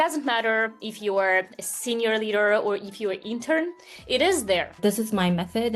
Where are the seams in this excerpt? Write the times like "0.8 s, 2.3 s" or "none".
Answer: 4.8 s

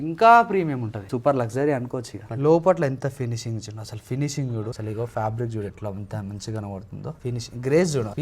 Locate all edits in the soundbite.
1.1 s, 2.2 s, 4.8 s, 7.2 s

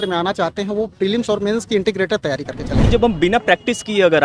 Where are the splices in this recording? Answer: 2.8 s

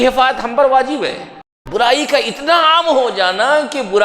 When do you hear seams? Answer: 1.6 s

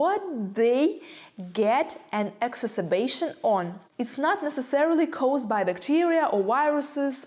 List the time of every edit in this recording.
none

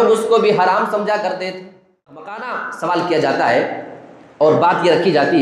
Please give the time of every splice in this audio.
2.2 s

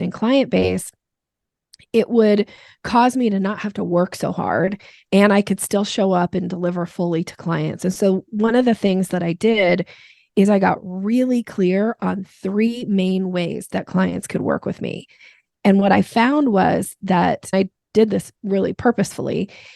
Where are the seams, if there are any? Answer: 17.5 s, 18.8 s

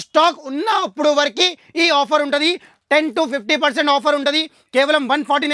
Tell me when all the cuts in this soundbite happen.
none

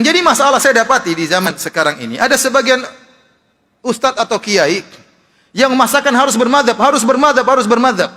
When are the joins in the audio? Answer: 1.5 s

